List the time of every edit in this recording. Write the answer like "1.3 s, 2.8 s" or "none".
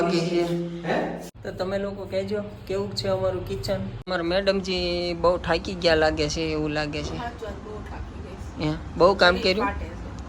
1.3 s, 3.9 s